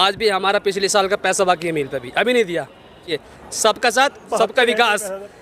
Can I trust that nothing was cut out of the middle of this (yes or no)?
no